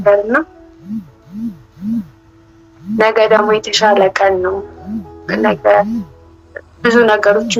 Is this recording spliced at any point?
no; 0 cuts

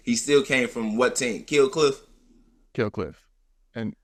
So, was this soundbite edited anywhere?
no; 0 cuts

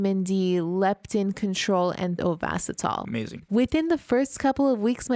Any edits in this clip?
yes; 2 cuts; at 2.2 s, 3.4 s

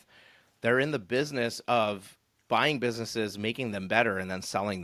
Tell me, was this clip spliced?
no; 0 cuts

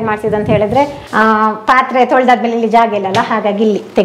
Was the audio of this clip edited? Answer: yes; 1 cut; at 1.0 s

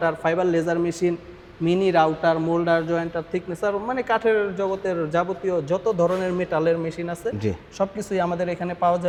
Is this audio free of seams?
yes; 0 cuts

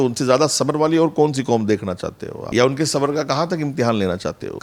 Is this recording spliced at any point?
no; 0 cuts

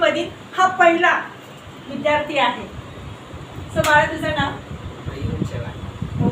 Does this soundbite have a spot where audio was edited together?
no; 0 cuts

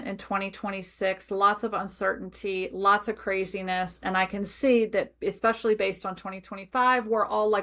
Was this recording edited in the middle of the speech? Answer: no; 0 cuts

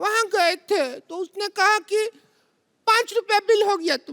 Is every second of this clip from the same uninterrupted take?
yes; 0 cuts

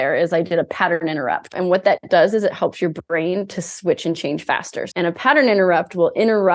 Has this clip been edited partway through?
yes; 2 cuts; at 1.2 s, 4.8 s

